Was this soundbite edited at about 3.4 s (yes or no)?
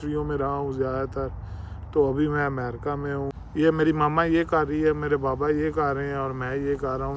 yes